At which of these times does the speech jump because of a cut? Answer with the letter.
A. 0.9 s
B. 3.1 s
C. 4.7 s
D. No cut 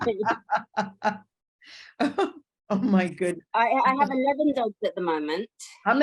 B